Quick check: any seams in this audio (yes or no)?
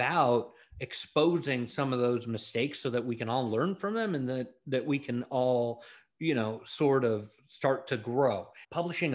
no